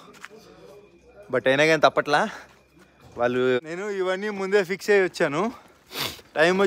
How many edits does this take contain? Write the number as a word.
one